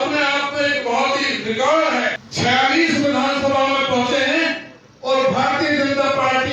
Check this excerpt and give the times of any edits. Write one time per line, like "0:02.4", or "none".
0:02.2